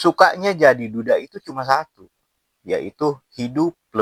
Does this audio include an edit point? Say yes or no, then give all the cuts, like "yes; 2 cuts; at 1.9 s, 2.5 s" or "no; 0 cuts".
no; 0 cuts